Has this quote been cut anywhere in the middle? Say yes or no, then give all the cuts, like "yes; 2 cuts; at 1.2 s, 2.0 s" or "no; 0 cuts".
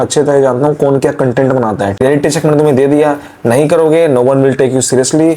yes; 1 cut; at 1.9 s